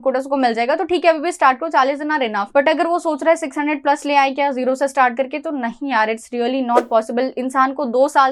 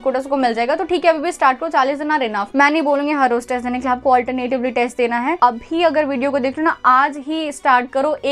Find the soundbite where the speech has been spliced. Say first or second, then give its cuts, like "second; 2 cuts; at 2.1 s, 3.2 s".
second; 2 cuts; at 2.5 s, 5.4 s